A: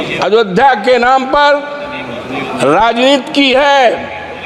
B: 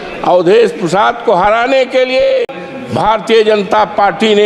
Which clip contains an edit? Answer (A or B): B